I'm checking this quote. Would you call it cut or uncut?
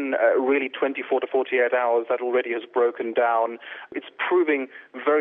cut